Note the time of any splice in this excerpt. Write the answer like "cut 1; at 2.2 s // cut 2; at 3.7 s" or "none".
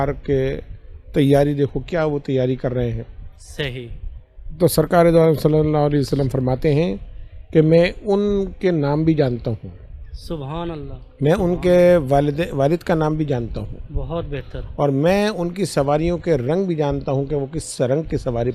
none